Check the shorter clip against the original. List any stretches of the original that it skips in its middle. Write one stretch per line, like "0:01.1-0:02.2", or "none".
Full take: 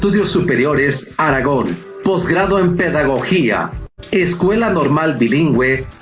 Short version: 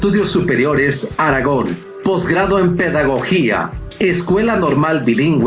0:04.1-0:04.2